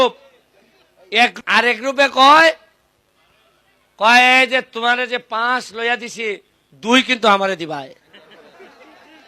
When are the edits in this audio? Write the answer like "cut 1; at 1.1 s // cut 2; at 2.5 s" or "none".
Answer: cut 1; at 1.3 s